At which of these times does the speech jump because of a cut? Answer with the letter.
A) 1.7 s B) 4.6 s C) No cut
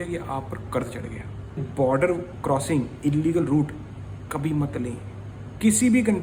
A